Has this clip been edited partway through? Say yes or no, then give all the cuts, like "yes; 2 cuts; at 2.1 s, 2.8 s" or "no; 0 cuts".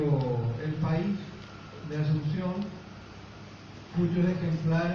no; 0 cuts